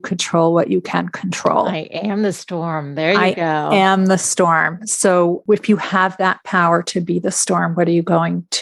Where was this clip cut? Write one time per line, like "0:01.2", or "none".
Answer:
0:05.4